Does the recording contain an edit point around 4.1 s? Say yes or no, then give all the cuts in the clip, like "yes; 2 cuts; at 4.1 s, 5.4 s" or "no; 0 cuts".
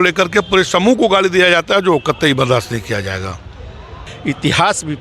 yes; 1 cut; at 4.1 s